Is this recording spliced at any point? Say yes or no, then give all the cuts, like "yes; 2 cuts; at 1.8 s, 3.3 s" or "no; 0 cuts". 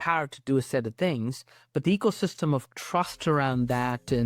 no; 0 cuts